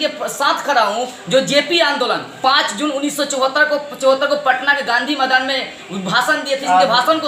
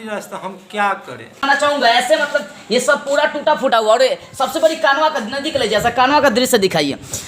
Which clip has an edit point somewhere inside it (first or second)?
second